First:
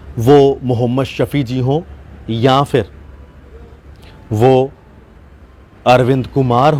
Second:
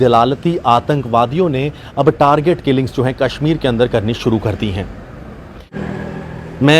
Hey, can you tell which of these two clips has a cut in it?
second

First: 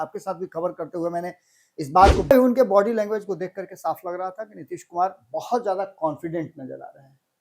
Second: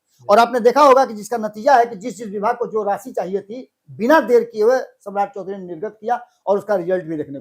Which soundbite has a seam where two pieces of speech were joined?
first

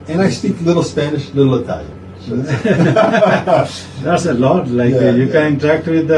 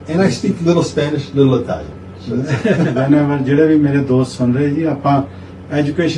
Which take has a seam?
second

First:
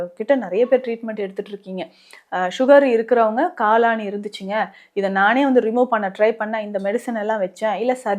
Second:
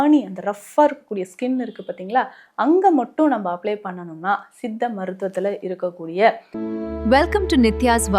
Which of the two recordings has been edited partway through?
second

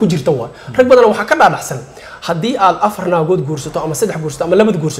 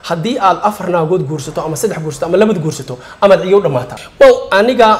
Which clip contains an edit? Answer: second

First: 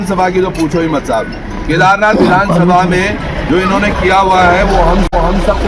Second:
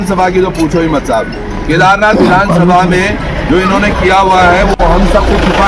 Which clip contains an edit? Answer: second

